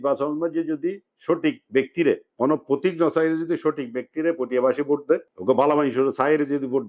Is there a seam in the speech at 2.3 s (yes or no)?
yes